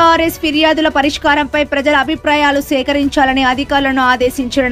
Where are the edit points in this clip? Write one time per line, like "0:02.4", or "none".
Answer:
none

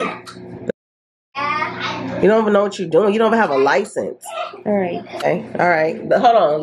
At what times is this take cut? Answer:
0:05.2

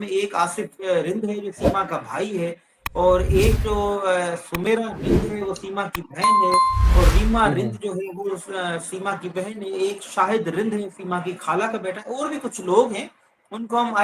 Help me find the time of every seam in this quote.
none

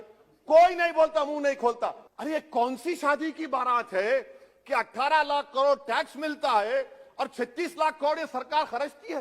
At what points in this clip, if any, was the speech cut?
0:02.1

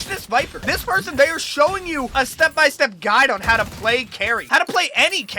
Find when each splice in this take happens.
0:04.4

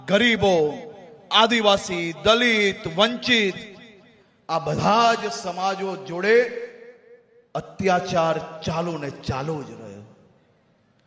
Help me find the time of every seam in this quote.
none

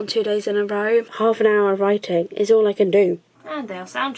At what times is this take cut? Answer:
0:01.1
0:03.3

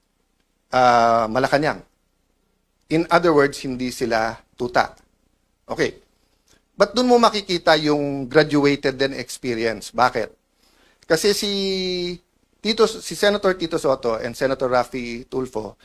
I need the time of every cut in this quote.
none

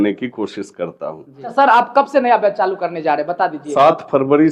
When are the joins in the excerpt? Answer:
0:01.4
0:03.6

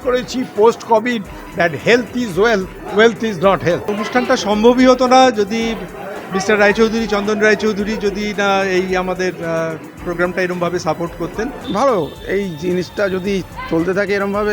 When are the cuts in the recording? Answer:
0:03.9
0:11.6

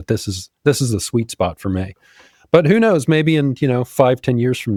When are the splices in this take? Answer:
none

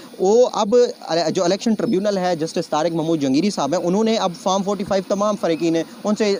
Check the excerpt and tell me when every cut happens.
none

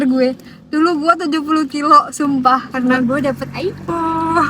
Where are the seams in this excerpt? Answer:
0:02.7

